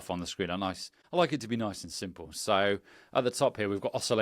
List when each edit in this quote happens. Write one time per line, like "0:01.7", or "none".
0:00.9

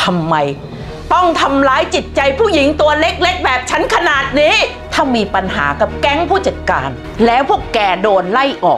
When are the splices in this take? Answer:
0:04.8
0:07.0

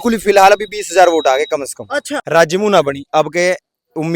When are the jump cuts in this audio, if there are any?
0:02.1

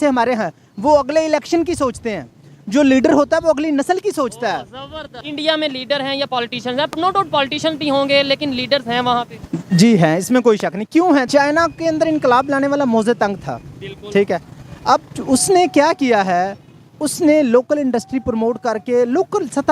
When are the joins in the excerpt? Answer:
0:05.1
0:11.3

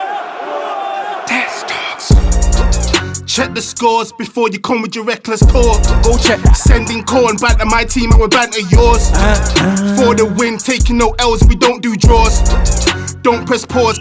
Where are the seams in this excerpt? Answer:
none

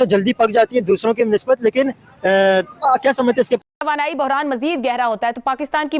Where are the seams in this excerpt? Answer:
0:03.6

